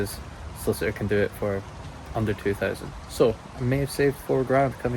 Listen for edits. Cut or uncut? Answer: uncut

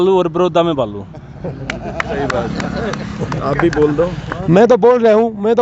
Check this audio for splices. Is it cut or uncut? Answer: uncut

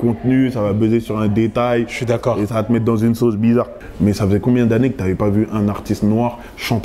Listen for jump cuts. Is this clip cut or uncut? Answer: cut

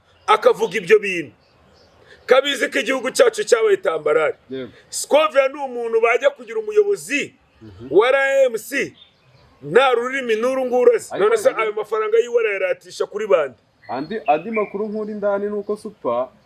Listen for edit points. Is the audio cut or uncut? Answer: cut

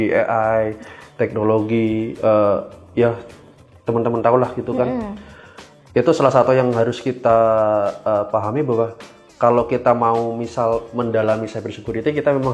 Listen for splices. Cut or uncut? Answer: uncut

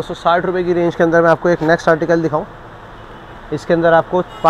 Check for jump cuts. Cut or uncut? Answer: uncut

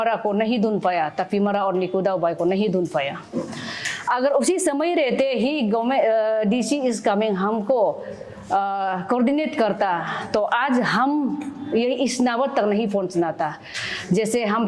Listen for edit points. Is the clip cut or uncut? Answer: uncut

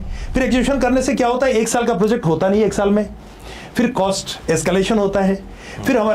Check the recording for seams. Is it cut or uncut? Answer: uncut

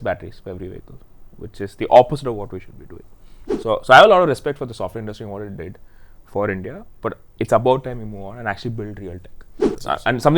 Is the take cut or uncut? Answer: cut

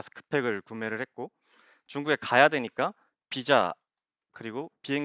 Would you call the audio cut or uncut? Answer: uncut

